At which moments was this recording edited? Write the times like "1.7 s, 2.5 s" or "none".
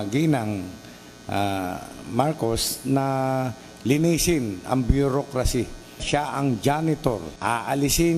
6.0 s, 7.3 s